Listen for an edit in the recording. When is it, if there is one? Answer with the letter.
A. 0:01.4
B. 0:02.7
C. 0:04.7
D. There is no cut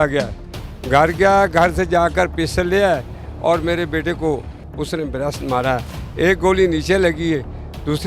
C